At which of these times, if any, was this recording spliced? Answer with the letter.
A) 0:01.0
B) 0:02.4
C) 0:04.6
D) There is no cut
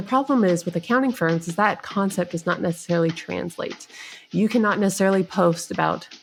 D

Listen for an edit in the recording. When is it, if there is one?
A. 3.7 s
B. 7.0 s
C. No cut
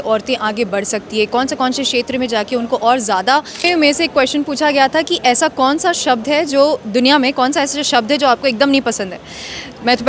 A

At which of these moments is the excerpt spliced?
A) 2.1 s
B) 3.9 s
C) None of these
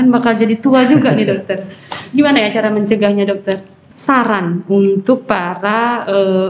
B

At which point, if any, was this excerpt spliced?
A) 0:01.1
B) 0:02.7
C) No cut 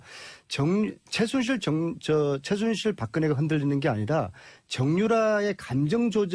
A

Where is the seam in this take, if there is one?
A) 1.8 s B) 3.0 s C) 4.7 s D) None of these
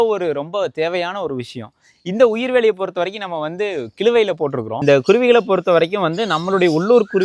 C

